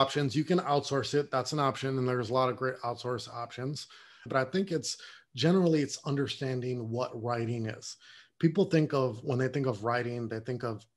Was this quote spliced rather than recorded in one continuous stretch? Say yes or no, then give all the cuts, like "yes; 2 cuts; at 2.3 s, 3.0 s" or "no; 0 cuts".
yes; 1 cut; at 4.3 s